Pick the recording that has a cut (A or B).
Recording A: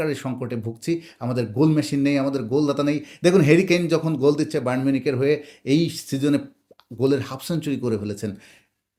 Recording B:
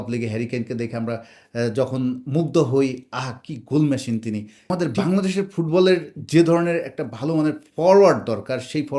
B